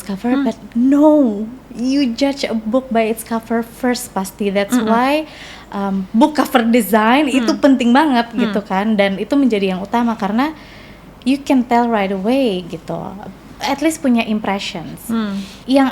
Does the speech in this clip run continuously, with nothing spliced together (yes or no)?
yes